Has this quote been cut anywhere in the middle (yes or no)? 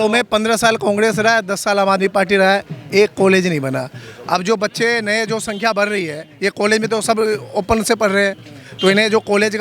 no